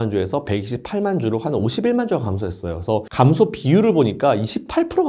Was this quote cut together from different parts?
no; 0 cuts

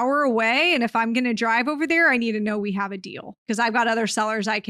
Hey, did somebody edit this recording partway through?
yes; 1 cut; at 3.4 s

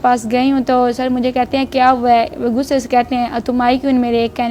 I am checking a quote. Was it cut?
no; 0 cuts

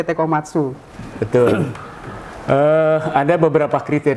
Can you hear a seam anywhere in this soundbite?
no; 0 cuts

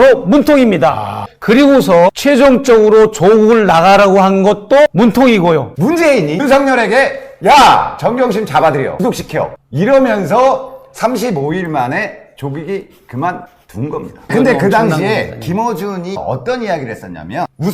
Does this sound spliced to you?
yes; 4 cuts; at 4.9 s, 5.8 s, 8.9 s, 14.3 s

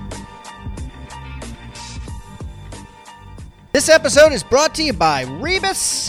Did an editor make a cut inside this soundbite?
yes; 2 cuts; at 1.7 s, 3.5 s

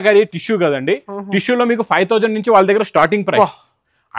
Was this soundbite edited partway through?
no; 0 cuts

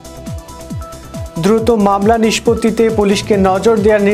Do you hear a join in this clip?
yes; 1 cut; at 1.3 s

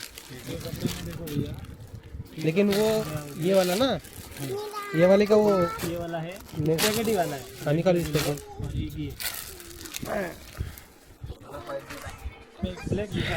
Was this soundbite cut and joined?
no; 0 cuts

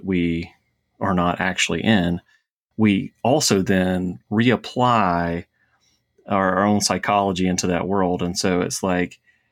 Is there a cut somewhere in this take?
no; 0 cuts

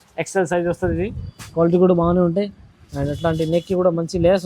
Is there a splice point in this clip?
no; 0 cuts

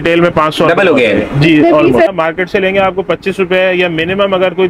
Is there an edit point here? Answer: yes; 1 cut; at 2.1 s

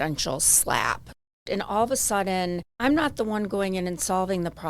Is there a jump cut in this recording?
yes; 2 cuts; at 1.3 s, 2.7 s

